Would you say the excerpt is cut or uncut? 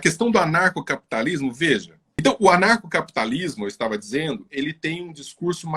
cut